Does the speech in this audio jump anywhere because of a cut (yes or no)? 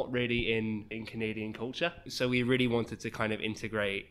yes